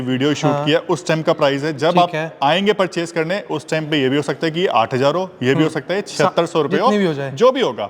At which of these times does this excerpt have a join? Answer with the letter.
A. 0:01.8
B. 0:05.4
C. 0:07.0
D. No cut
D